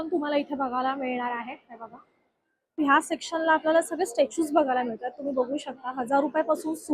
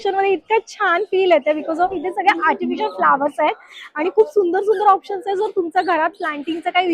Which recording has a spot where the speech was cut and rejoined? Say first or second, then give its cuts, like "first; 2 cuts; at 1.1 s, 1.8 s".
first; 1 cut; at 2.8 s